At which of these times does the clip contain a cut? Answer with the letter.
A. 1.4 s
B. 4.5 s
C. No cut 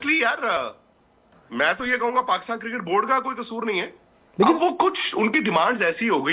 B